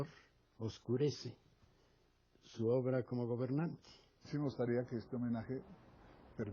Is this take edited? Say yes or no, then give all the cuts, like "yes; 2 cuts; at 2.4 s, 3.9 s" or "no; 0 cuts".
yes; 1 cut; at 4.1 s